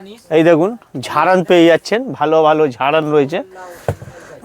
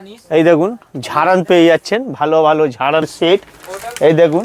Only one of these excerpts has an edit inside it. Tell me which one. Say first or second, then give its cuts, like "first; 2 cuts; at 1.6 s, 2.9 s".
second; 1 cut; at 3.1 s